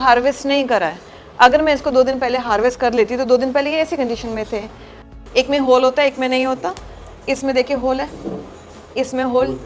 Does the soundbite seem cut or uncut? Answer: cut